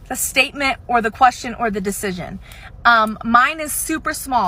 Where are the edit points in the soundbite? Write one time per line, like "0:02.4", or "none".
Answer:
none